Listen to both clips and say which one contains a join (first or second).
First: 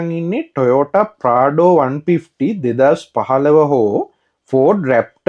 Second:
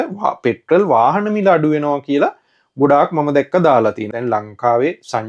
second